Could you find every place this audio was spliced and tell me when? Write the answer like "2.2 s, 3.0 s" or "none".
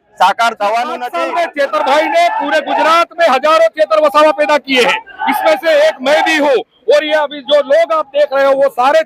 1.1 s